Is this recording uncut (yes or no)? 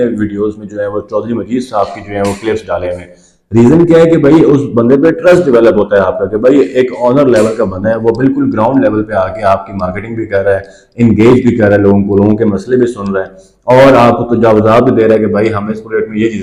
yes